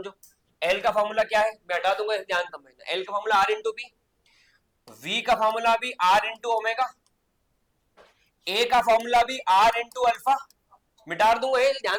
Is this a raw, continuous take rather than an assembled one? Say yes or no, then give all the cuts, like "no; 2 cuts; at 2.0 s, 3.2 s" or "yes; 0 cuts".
yes; 0 cuts